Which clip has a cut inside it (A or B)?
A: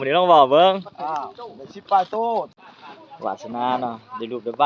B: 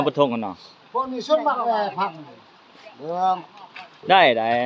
A